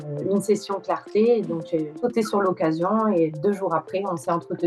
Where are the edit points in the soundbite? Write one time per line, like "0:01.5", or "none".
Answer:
none